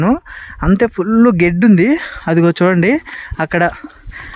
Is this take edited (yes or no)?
no